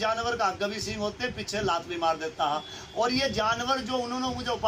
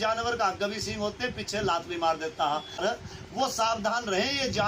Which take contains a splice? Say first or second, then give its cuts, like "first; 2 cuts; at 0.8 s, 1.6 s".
second; 1 cut; at 2.8 s